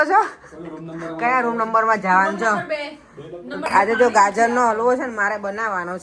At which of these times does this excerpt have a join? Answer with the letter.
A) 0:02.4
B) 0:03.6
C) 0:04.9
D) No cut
B